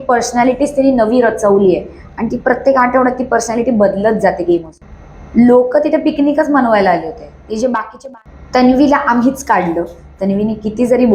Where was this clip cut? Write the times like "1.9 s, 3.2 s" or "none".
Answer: 4.8 s, 7.9 s